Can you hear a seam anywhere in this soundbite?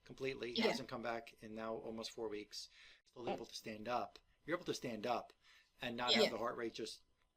yes; 1 cut; at 3.1 s

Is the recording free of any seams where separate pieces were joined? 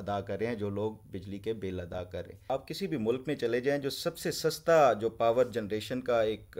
no; 1 cut; at 2.4 s

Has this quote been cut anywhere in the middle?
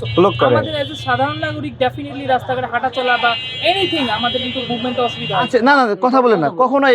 yes; 1 cut; at 5.5 s

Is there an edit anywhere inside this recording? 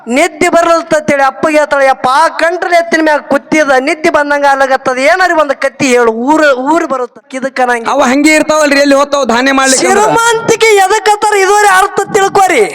yes; 1 cut; at 7.1 s

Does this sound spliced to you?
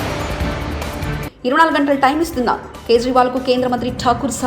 yes; 1 cut; at 1.1 s

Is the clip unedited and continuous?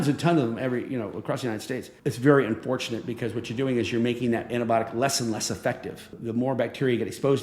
no; 2 cuts; at 1.9 s, 6.2 s

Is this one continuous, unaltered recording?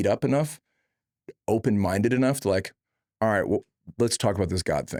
yes; 0 cuts

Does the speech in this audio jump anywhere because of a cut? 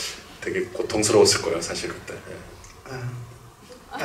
no; 0 cuts

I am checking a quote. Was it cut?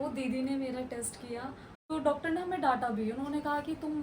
yes; 1 cut; at 1.9 s

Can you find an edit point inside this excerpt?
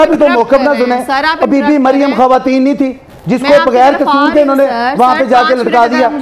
no; 0 cuts

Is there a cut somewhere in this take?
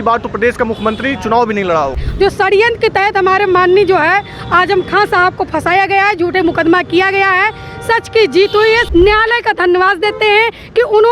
yes; 2 cuts; at 2.0 s, 8.8 s

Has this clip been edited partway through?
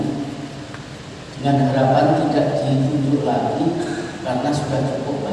no; 0 cuts

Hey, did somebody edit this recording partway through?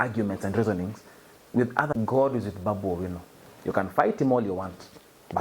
yes; 1 cut; at 1.9 s

